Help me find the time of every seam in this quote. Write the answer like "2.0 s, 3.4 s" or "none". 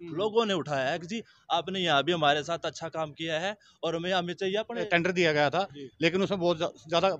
4.9 s